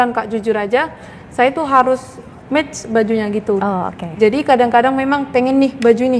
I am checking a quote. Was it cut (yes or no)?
no